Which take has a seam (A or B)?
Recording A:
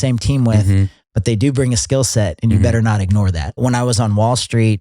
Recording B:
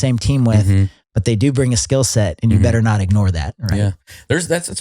A